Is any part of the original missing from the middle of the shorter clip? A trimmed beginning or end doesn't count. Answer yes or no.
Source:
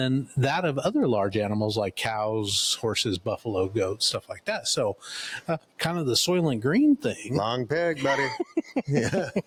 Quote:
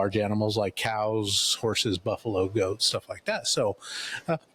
no